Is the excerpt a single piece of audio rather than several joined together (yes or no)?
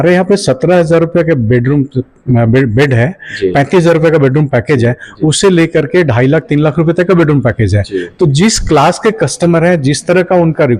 yes